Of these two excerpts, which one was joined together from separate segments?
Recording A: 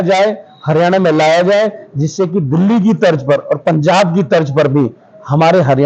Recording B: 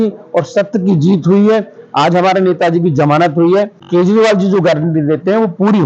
B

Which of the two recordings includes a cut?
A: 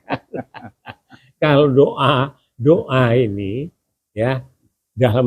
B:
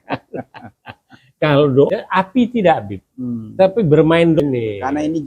B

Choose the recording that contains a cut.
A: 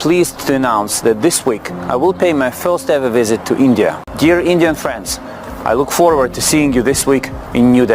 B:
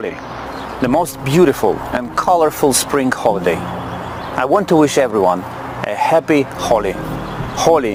A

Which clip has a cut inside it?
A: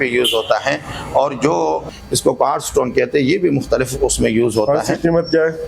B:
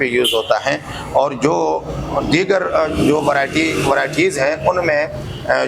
A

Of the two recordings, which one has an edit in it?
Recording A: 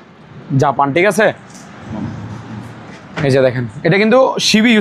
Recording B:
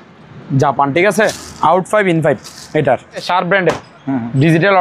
B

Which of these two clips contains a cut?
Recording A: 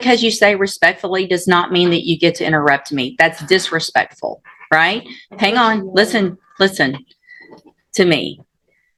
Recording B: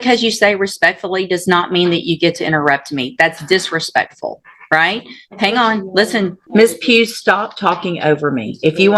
B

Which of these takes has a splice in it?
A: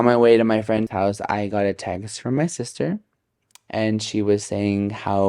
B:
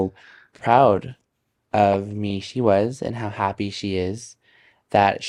A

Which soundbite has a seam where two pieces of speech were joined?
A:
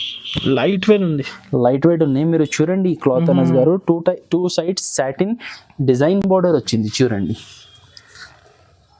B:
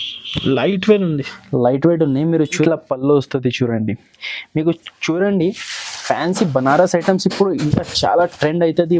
B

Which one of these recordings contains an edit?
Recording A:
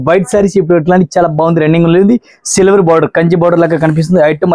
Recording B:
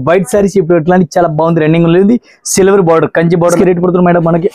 B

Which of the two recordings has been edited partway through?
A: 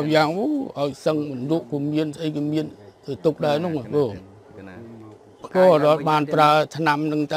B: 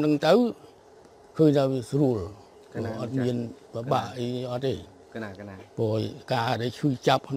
A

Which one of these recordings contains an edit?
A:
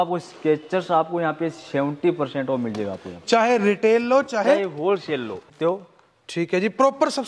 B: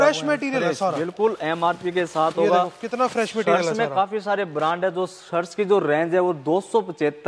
A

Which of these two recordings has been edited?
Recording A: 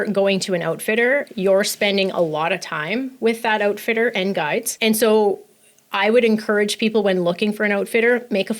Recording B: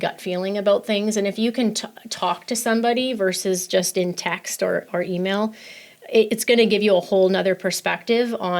A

